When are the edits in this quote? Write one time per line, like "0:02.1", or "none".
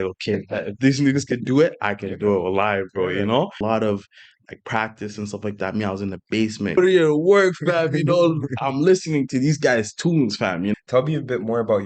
0:03.6
0:06.8
0:10.7